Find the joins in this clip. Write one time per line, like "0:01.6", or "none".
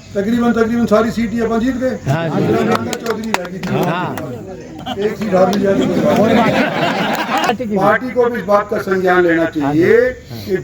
0:07.5